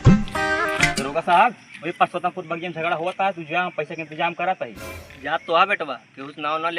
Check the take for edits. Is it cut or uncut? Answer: cut